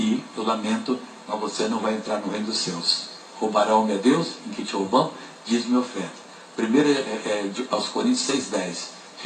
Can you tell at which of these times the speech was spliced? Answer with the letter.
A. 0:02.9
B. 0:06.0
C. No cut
A